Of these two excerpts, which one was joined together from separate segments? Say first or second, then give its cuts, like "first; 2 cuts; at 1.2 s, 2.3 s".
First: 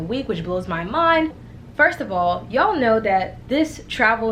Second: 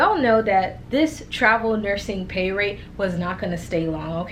first; 1 cut; at 1.5 s